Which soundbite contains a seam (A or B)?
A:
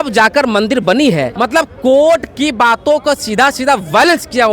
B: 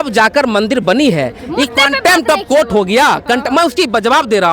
A